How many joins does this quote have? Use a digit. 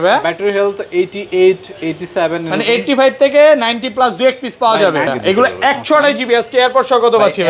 1